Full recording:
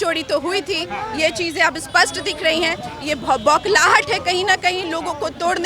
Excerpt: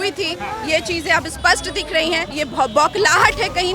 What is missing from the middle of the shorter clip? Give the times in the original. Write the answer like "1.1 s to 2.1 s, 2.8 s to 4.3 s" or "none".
2.8 s to 3.0 s